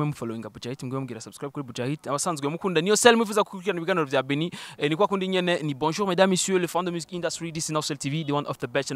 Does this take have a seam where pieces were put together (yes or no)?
no